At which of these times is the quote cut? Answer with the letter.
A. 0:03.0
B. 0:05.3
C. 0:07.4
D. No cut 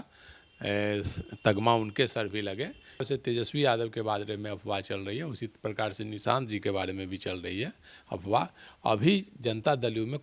A